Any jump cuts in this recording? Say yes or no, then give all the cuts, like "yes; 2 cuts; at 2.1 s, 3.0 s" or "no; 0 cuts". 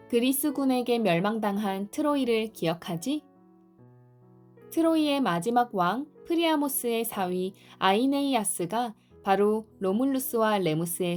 no; 0 cuts